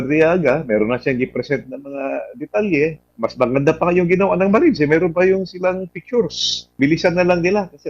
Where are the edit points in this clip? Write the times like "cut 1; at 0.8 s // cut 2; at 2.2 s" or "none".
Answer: cut 1; at 3.0 s // cut 2; at 6.7 s